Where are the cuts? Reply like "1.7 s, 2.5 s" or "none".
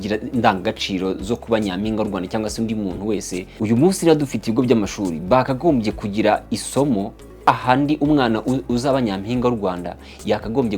3.4 s, 7.5 s